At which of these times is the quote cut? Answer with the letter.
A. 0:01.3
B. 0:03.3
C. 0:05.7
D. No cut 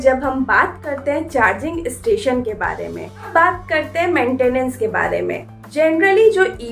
B